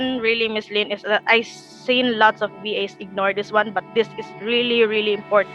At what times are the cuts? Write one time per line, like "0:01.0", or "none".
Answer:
none